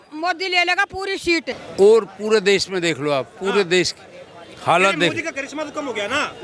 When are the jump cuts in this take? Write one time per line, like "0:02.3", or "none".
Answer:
0:01.5